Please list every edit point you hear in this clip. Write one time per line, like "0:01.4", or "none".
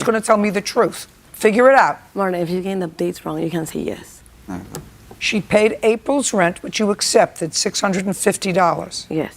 0:02.0
0:05.5